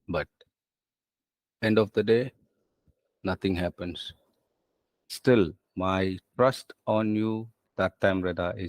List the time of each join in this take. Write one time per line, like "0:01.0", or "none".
0:04.9